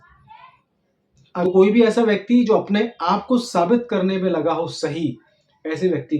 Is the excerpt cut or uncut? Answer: cut